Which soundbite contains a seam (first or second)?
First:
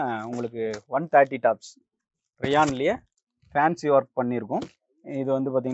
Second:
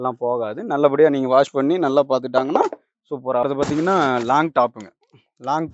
second